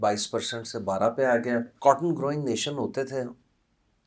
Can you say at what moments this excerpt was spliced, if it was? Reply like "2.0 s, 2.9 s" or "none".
1.7 s